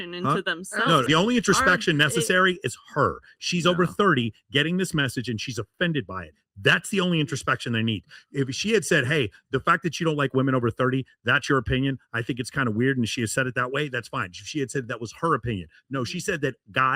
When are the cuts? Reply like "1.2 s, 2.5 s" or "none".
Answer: 1.0 s